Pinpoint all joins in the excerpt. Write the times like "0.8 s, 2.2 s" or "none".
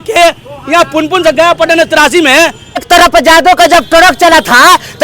2.8 s